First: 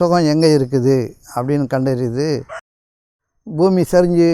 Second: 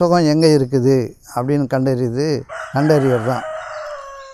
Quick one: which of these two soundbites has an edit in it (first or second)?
first